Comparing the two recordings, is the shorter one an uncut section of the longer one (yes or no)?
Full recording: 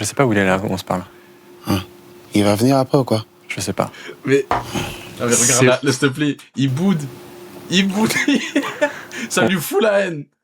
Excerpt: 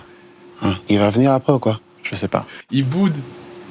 no